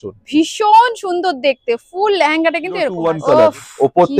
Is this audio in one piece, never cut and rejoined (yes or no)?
no